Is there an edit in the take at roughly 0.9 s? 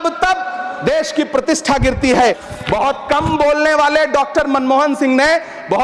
no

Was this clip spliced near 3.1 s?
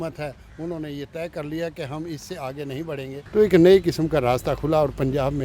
yes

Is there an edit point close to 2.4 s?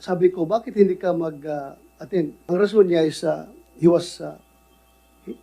yes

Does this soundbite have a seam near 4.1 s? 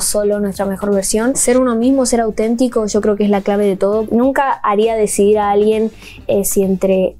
yes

